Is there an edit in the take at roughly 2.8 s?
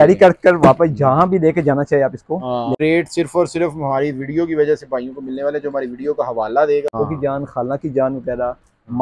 yes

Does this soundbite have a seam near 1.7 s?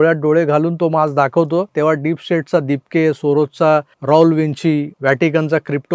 yes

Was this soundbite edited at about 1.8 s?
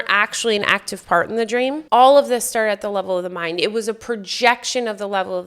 yes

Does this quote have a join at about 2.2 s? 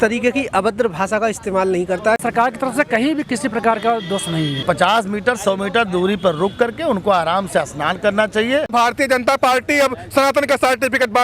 yes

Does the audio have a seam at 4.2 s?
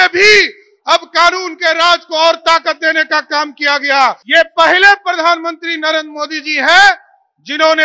yes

